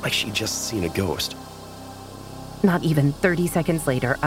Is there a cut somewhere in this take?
yes; 1 cut; at 1.9 s

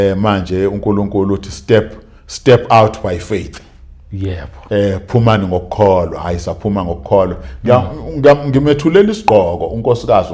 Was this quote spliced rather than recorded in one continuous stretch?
no; 0 cuts

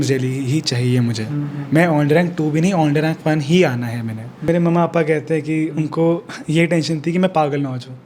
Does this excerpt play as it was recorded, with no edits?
no; 1 cut; at 4.4 s

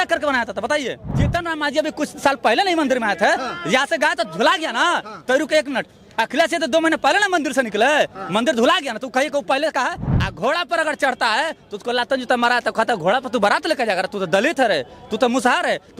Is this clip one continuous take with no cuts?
no; 2 cuts; at 1.1 s, 10.0 s

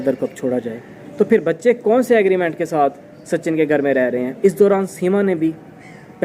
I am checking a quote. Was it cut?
yes; 2 cuts; at 1.0 s, 4.3 s

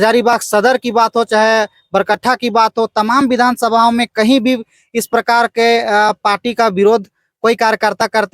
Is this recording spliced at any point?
no; 0 cuts

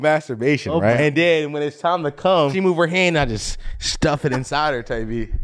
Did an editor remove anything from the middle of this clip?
yes; 2 cuts; at 1.0 s, 2.5 s

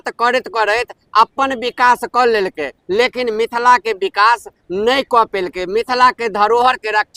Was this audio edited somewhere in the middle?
no; 0 cuts

